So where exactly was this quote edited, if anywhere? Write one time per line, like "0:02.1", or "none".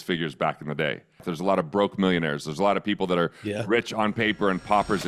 0:01.3